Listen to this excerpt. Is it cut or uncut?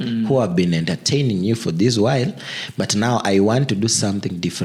uncut